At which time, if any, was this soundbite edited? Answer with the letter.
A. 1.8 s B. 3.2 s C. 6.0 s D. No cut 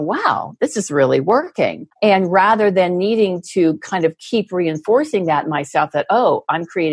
A